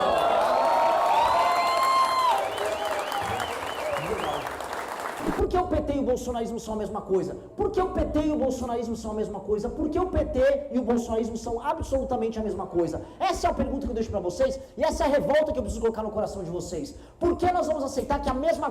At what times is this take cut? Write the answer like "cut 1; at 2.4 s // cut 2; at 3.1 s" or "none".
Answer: cut 1; at 5.3 s